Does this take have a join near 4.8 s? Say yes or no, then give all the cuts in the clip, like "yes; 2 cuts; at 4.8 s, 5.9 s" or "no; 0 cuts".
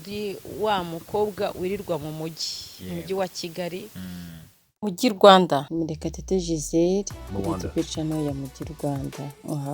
yes; 1 cut; at 4.8 s